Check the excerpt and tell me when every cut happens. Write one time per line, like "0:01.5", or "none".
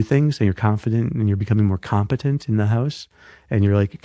none